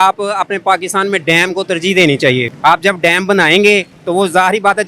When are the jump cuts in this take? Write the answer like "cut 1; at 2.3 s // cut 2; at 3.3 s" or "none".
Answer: cut 1; at 2.5 s // cut 2; at 4.0 s